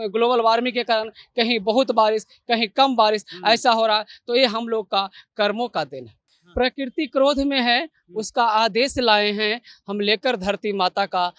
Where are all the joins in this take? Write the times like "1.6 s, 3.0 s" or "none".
6.4 s